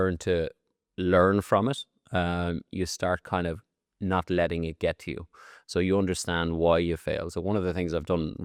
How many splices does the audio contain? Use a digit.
0